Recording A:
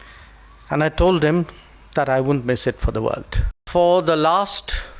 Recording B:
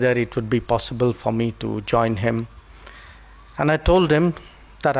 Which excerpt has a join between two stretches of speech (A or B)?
A